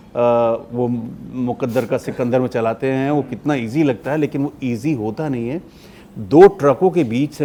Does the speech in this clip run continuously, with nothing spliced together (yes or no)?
yes